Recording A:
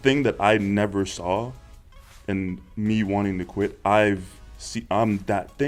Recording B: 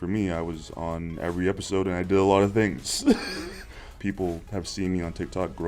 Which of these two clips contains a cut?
B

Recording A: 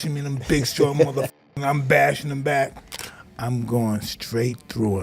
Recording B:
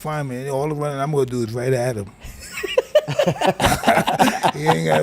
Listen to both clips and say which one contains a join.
A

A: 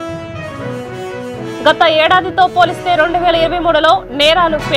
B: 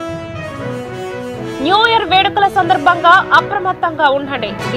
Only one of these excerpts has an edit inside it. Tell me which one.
B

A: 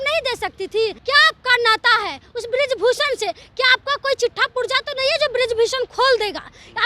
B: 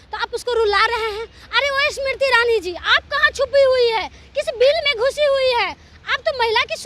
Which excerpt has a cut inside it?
A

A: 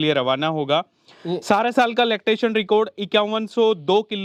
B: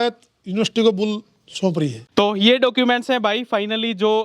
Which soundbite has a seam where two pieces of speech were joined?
B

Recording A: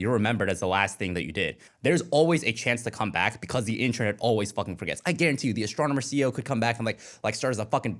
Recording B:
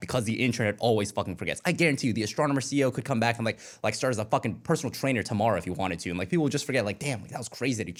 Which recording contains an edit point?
A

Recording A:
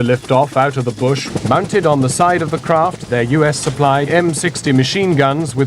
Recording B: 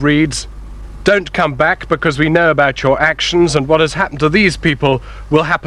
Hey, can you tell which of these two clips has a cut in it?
A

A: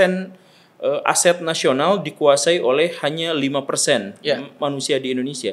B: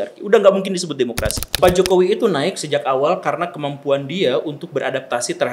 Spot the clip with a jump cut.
B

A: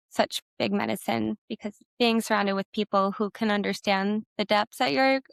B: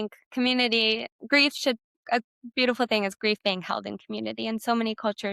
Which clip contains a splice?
B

